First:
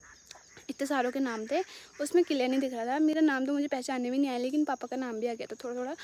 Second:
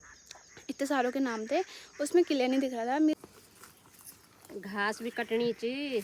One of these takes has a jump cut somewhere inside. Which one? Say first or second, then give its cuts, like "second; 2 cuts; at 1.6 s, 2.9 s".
second; 1 cut; at 3.1 s